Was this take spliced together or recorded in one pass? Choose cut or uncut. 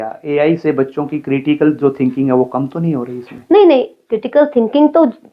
uncut